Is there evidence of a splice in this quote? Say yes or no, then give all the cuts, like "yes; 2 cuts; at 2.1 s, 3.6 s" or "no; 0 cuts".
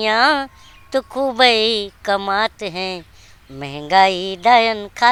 no; 0 cuts